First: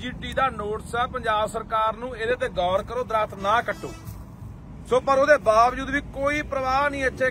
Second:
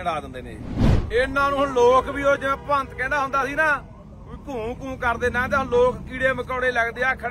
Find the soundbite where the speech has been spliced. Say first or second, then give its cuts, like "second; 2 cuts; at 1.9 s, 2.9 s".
second; 1 cut; at 1.0 s